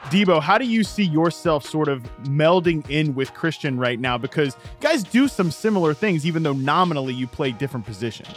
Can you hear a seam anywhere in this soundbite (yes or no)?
no